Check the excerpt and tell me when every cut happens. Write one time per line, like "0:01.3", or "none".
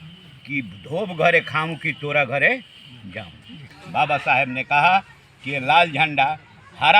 0:03.7